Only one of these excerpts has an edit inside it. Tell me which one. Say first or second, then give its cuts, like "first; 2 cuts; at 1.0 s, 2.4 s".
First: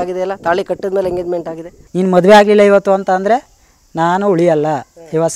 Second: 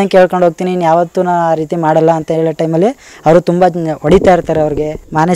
first; 1 cut; at 1.8 s